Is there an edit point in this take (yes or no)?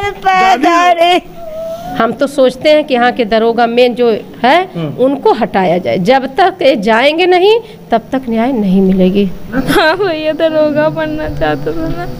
yes